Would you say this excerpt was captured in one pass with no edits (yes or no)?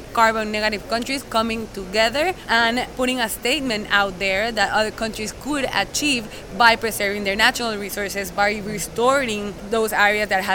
no